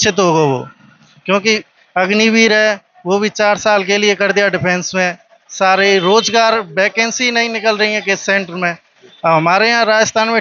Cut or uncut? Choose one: uncut